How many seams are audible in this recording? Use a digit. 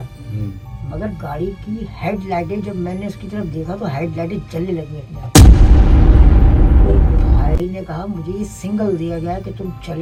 0